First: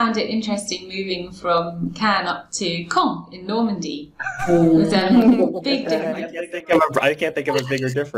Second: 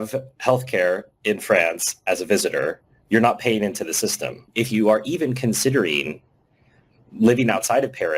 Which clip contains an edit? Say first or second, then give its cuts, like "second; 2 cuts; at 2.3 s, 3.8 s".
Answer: second; 1 cut; at 4.5 s